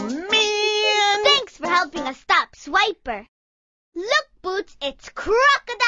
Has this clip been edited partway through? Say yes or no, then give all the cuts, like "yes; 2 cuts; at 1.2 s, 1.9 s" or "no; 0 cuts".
yes; 1 cut; at 1.2 s